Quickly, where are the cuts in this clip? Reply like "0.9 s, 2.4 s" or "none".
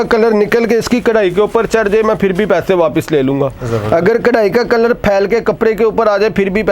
none